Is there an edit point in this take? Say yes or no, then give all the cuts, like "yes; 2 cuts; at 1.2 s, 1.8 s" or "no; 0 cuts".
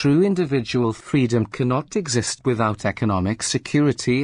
no; 0 cuts